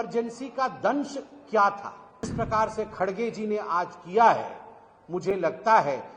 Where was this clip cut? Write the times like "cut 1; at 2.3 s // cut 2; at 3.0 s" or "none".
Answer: cut 1; at 2.3 s